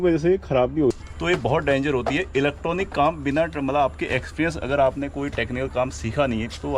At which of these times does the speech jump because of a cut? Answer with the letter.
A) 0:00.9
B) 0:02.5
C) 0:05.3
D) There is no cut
A